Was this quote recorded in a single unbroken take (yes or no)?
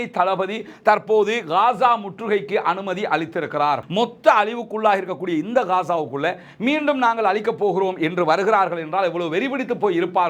no